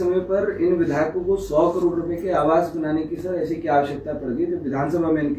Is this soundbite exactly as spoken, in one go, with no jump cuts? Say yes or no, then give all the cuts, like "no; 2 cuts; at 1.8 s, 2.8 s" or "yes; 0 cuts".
yes; 0 cuts